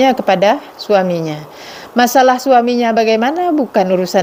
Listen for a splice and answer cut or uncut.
uncut